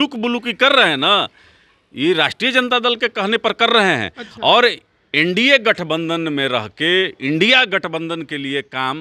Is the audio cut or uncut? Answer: uncut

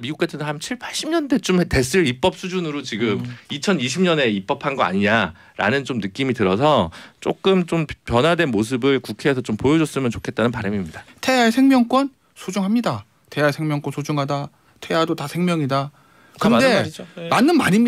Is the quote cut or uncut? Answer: cut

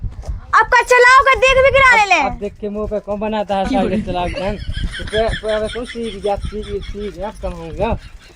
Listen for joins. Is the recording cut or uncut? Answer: uncut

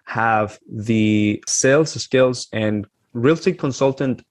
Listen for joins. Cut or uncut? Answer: cut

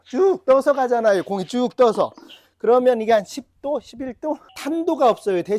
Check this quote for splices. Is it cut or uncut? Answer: cut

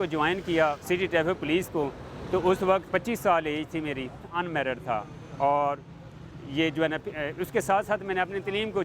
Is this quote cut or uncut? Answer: cut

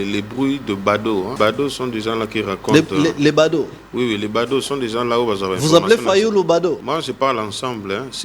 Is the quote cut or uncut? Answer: cut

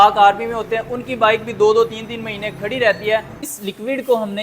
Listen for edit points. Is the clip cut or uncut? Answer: cut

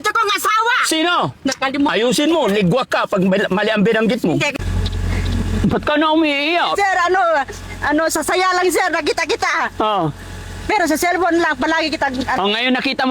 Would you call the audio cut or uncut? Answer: cut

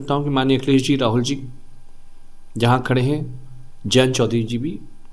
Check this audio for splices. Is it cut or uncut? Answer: uncut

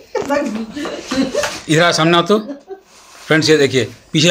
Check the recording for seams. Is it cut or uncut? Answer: uncut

